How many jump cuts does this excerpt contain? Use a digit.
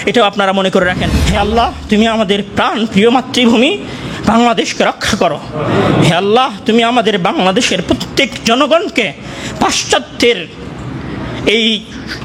1